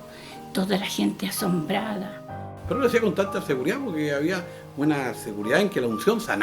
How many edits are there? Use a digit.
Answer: 1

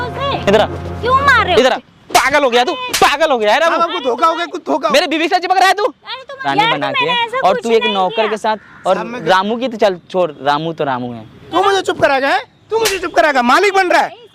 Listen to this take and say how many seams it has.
3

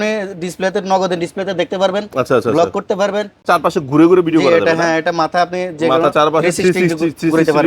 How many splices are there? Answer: 1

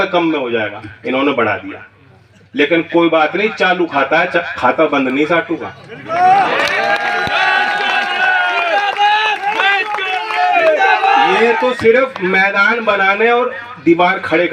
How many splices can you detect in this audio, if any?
0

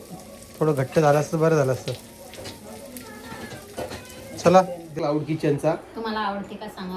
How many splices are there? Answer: 1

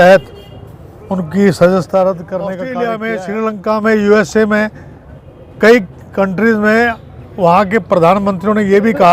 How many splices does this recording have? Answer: 1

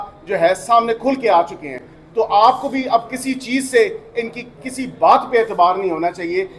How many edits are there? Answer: 0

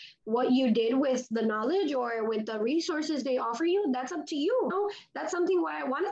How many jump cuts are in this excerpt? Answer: 1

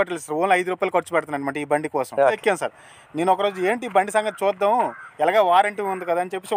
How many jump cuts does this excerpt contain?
1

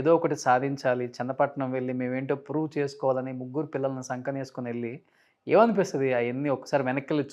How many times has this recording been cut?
0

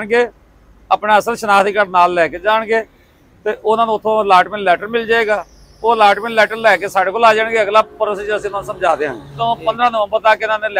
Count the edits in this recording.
1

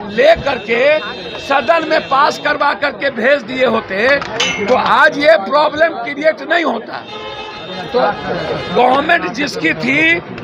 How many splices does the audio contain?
0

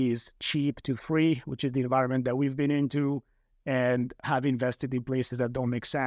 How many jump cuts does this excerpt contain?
1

